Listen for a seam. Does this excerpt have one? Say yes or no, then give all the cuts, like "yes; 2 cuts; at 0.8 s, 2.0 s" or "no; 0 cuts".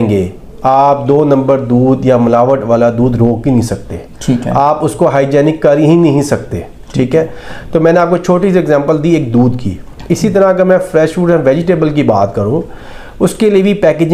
no; 0 cuts